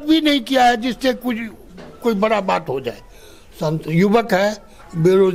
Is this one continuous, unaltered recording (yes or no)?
yes